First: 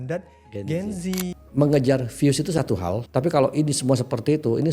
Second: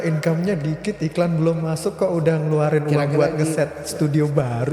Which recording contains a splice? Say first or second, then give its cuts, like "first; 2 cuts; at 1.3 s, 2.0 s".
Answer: first; 2 cuts; at 1.4 s, 3.0 s